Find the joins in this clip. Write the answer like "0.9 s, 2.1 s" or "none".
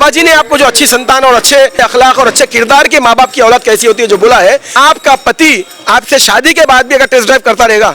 1.8 s, 4.7 s